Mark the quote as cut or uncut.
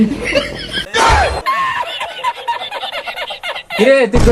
uncut